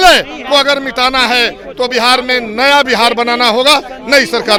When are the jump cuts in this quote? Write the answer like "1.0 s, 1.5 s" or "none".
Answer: none